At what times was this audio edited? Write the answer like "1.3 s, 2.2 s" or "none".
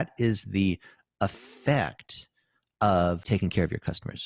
3.2 s